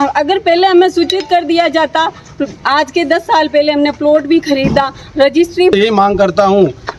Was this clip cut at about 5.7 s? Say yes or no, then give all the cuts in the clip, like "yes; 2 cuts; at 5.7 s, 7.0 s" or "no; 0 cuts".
yes; 1 cut; at 5.7 s